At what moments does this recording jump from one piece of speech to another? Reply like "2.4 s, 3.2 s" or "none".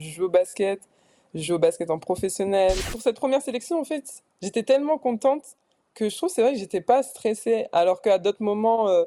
2.9 s